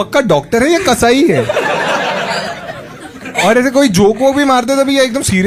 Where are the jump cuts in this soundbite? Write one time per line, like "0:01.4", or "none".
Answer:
none